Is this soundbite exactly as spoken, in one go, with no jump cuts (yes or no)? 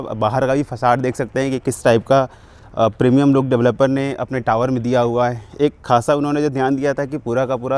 yes